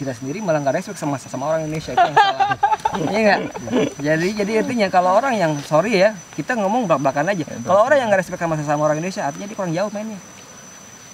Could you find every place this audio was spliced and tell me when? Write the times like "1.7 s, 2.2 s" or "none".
none